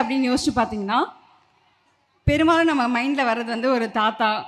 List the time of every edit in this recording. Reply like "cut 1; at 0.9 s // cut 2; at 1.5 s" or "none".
none